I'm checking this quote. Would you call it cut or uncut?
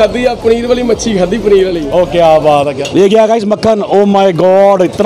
cut